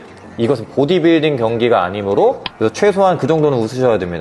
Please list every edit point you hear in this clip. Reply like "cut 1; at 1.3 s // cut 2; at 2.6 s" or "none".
cut 1; at 2.5 s